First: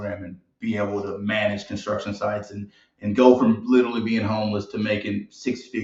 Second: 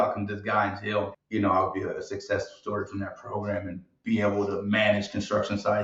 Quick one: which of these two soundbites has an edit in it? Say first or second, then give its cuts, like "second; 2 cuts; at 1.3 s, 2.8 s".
second; 1 cut; at 1.2 s